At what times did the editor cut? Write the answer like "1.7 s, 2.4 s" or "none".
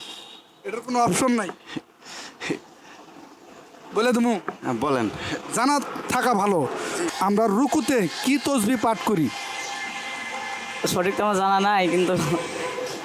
7.1 s